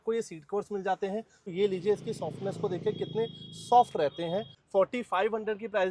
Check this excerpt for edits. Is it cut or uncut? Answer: cut